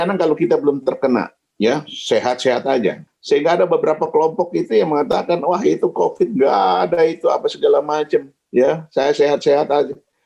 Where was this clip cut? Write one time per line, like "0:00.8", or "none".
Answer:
0:01.4
0:03.1
0:08.4